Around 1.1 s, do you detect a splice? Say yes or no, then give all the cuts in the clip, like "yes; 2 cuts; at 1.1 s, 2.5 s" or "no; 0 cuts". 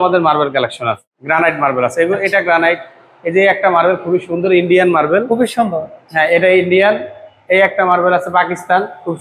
yes; 1 cut; at 1.1 s